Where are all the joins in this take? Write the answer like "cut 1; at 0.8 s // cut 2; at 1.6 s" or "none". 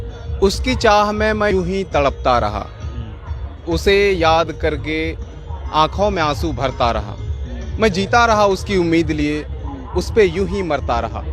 cut 1; at 1.5 s